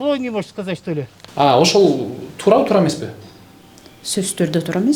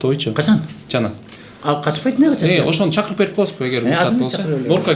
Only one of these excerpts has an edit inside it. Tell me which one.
first; 1 cut; at 1.2 s

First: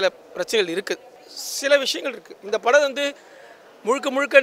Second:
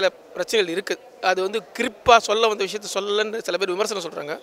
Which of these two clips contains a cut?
first; 1 cut; at 1.0 s

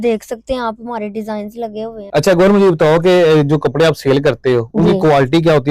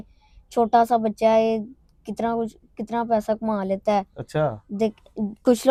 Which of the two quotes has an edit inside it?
first; 1 cut; at 2.0 s

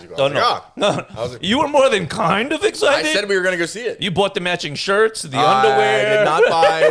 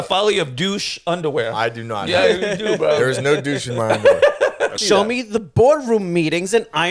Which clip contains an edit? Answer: second; 1 cut; at 4.8 s

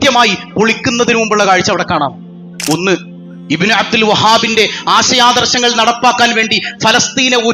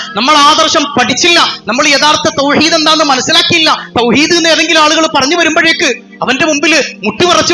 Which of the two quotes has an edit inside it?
first; 1 cut; at 2.5 s

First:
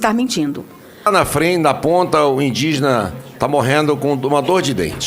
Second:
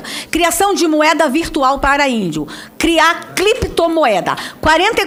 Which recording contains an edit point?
first; 1 cut; at 1.1 s

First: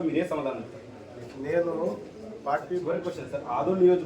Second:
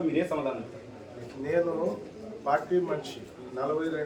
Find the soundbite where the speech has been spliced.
first; 1 cut; at 2.8 s

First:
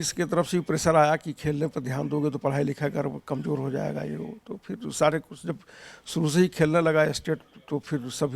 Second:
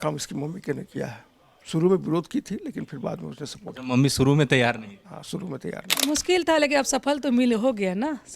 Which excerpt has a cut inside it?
second; 1 cut; at 5.9 s

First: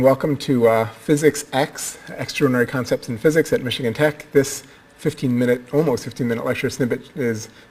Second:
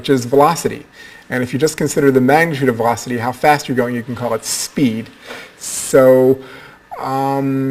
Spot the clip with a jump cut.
first; 1 cut; at 5.8 s

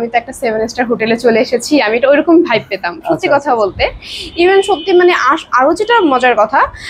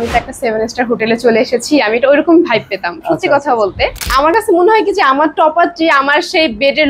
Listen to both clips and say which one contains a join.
second; 1 cut; at 4.3 s

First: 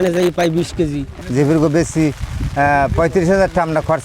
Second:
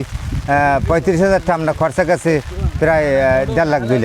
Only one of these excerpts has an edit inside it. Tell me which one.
first; 1 cut; at 1.2 s

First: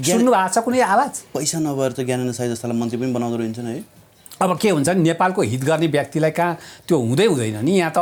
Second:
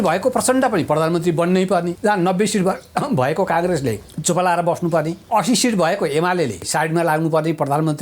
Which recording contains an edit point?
second; 4 cuts; at 1.9 s, 4.1 s, 5.2 s, 6.7 s

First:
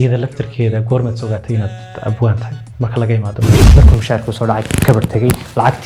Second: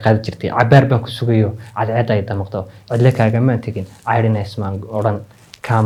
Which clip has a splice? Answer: first; 1 cut; at 3.6 s

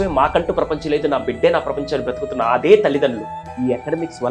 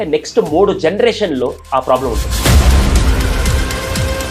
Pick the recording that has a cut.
first; 1 cut; at 3.4 s

